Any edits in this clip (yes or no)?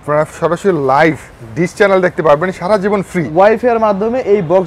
yes